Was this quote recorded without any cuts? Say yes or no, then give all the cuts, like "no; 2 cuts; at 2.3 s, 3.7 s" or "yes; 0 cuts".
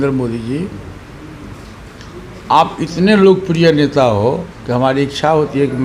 yes; 0 cuts